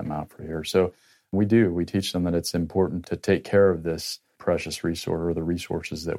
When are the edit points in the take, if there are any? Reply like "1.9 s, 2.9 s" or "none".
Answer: 1.3 s, 3.0 s, 4.4 s